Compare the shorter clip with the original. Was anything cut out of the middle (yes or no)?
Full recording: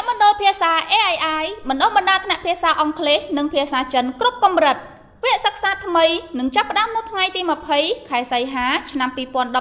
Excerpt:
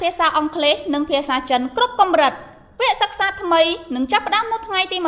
no